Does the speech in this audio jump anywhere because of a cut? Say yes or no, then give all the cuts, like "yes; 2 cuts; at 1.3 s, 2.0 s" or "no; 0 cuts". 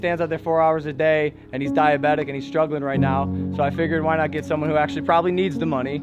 no; 0 cuts